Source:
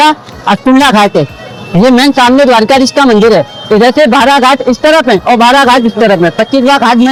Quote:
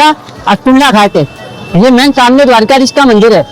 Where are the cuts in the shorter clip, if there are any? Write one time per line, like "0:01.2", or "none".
none